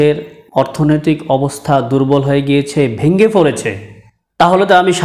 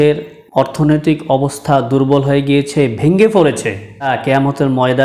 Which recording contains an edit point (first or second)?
second